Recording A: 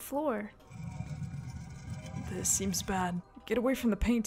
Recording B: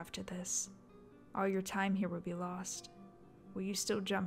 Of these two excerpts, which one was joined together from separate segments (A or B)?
A